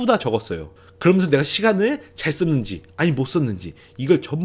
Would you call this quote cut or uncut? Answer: uncut